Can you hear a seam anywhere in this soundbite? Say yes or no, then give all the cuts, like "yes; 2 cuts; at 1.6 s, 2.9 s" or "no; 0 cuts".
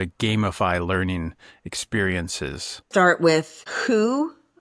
yes; 1 cut; at 2.8 s